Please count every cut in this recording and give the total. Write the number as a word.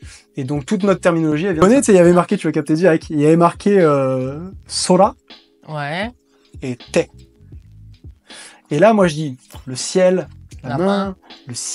one